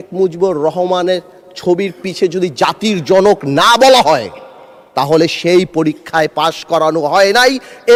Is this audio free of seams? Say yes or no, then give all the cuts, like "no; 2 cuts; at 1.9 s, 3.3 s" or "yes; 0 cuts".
yes; 0 cuts